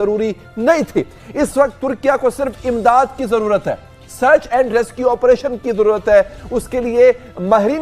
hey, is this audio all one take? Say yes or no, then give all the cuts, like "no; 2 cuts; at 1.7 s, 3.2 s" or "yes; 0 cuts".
yes; 0 cuts